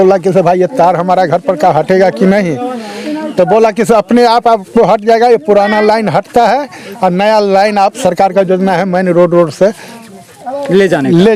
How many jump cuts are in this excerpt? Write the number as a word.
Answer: zero